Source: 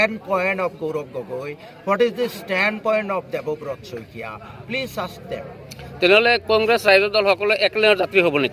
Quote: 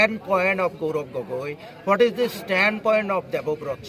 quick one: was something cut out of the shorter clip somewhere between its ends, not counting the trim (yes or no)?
no